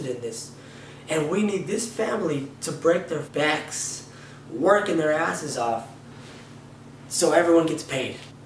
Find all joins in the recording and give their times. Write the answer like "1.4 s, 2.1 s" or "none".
3.3 s